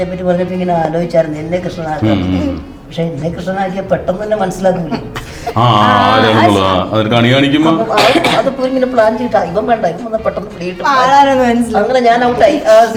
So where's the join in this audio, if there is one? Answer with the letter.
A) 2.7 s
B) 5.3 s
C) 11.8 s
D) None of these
D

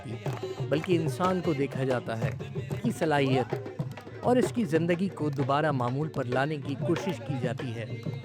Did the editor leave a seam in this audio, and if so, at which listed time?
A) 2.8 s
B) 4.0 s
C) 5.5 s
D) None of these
A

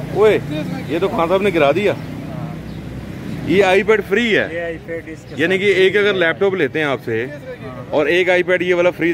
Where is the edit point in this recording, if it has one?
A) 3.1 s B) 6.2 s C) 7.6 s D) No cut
D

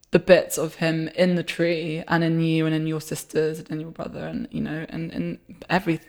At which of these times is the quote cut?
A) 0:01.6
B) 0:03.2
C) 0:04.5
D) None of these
D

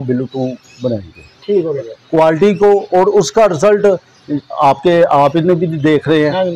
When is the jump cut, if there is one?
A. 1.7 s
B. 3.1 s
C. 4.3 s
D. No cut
A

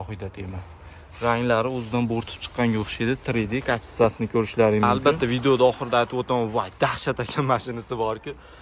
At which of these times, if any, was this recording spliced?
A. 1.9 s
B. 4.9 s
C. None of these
B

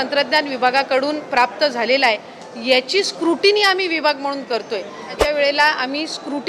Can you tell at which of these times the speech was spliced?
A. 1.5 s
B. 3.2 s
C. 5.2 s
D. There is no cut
C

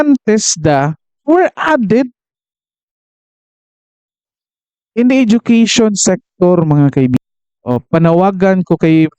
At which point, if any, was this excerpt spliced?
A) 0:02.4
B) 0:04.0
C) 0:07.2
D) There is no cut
C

